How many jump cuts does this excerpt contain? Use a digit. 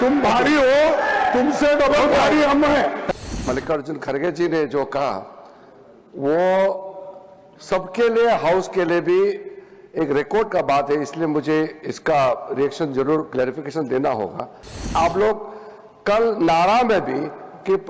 2